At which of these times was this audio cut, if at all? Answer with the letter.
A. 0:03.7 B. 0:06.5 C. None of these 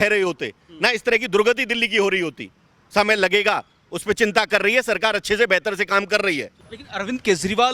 B